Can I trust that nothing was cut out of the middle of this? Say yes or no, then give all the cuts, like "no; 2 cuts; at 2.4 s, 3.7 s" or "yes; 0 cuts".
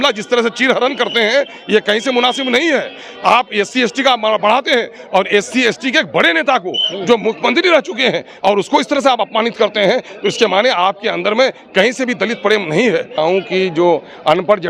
no; 1 cut; at 13.2 s